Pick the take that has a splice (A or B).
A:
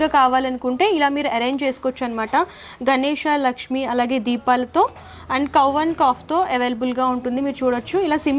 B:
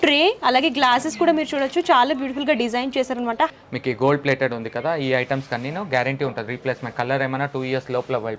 B